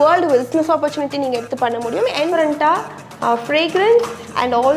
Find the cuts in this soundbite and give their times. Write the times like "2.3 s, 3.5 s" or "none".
2.3 s